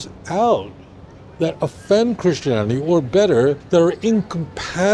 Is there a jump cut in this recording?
yes; 1 cut; at 3.6 s

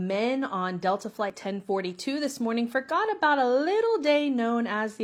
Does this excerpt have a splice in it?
no; 0 cuts

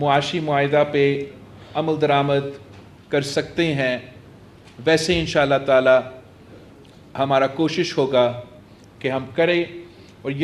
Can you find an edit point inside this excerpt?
no; 0 cuts

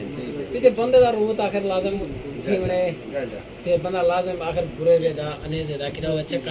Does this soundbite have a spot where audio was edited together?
no; 0 cuts

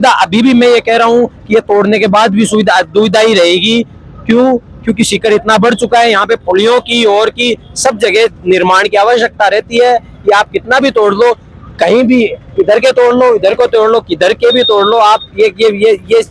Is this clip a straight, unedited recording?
yes; 0 cuts

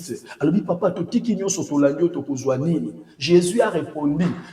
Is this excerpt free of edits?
yes; 0 cuts

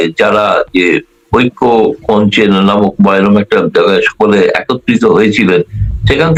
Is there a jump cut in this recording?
no; 0 cuts

